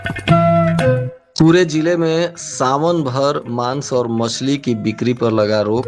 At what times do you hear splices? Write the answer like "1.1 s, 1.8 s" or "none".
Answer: 1.2 s